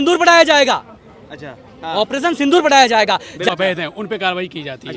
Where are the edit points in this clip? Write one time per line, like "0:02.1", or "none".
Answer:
0:03.5